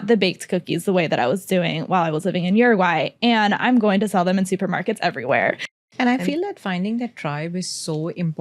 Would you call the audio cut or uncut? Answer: cut